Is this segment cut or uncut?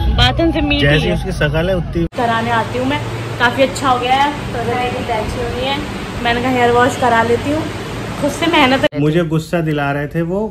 cut